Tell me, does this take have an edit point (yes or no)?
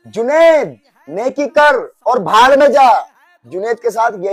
no